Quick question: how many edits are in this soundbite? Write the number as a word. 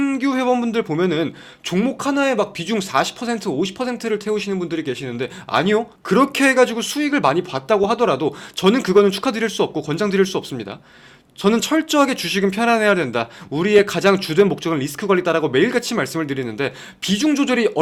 zero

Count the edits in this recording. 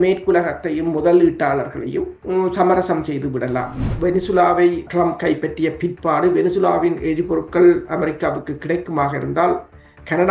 three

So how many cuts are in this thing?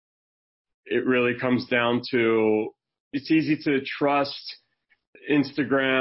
two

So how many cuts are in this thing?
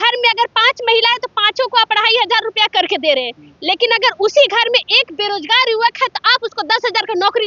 zero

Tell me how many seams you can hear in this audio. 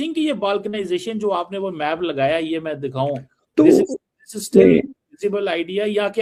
zero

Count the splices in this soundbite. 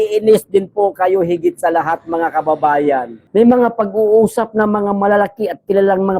one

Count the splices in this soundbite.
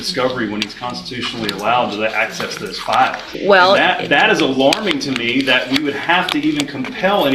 one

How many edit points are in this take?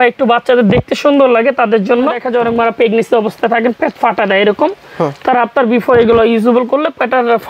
one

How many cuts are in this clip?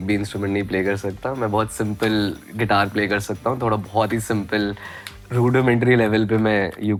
zero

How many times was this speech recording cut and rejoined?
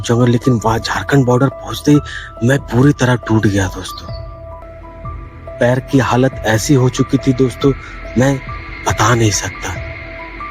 one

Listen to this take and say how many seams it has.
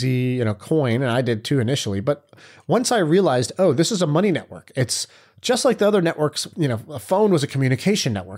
one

